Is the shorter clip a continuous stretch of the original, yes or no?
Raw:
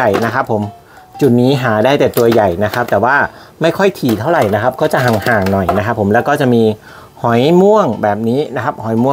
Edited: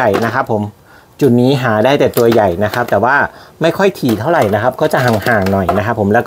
yes